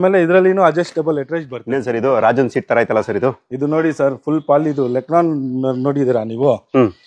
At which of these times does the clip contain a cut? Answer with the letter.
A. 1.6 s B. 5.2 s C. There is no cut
A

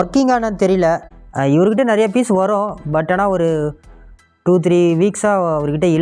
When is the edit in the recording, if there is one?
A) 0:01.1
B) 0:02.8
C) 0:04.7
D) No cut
A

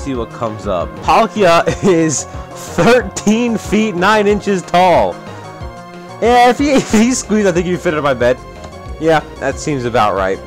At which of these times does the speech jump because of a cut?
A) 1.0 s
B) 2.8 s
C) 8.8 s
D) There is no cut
A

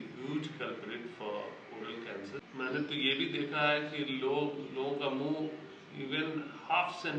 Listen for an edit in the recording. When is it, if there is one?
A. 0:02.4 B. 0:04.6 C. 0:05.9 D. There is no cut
A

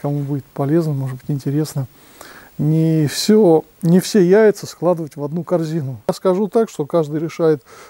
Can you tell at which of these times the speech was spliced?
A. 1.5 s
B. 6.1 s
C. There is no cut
B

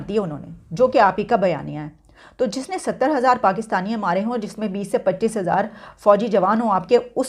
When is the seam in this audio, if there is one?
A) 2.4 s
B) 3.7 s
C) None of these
C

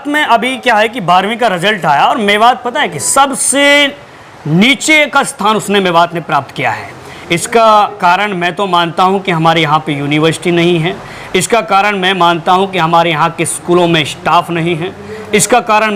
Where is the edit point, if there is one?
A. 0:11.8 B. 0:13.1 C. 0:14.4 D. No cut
D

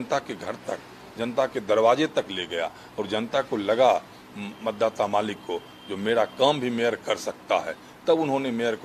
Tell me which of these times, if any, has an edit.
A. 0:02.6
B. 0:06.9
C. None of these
C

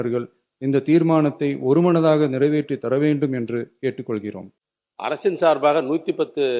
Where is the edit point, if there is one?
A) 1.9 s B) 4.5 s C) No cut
B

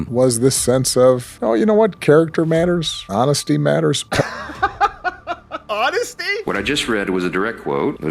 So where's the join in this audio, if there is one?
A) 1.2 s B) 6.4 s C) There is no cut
B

